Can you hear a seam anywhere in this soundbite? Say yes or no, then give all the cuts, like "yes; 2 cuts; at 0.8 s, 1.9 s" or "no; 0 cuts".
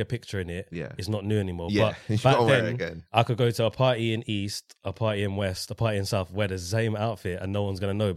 no; 0 cuts